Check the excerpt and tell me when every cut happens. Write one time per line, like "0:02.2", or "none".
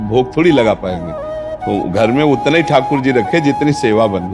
none